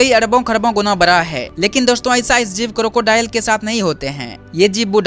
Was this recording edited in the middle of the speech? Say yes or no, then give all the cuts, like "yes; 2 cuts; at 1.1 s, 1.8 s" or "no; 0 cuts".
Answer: yes; 1 cut; at 1.4 s